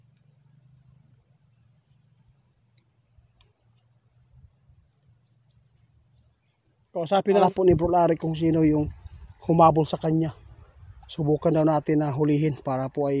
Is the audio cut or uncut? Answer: cut